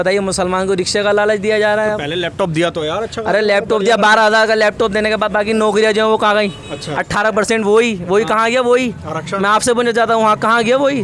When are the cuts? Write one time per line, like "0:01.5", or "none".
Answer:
none